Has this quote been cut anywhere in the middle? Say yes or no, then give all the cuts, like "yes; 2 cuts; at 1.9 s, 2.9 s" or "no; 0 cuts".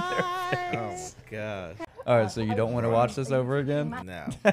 yes; 1 cut; at 1.8 s